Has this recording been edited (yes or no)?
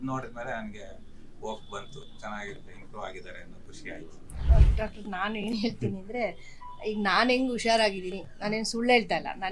yes